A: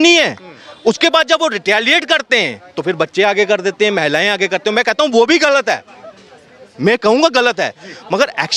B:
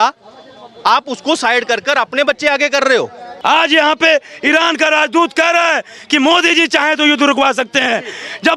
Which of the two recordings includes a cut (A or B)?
B